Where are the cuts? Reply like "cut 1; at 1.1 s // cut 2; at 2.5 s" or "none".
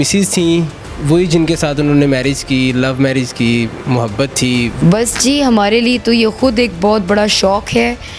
cut 1; at 4.7 s